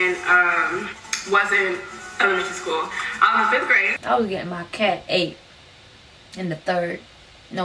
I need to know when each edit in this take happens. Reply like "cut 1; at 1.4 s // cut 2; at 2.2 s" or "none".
cut 1; at 3.9 s